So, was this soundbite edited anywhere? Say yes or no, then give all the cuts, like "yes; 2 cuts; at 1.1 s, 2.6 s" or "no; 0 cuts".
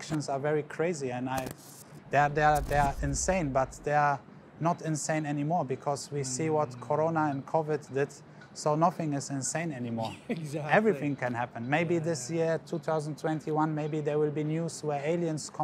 no; 0 cuts